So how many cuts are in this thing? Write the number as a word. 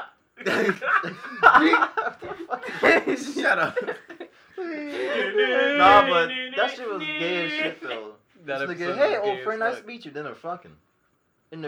zero